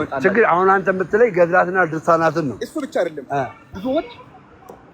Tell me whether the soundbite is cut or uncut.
uncut